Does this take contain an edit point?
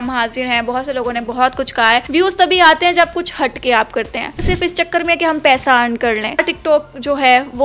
yes; 3 cuts; at 2.1 s, 4.4 s, 6.5 s

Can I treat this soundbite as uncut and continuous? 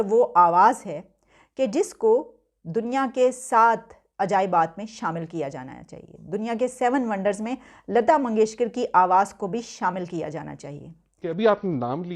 no; 1 cut; at 11.2 s

